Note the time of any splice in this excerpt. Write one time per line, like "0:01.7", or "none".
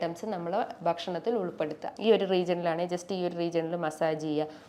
0:01.9